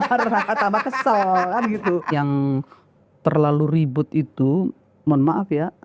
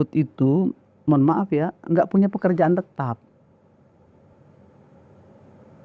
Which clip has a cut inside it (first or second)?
first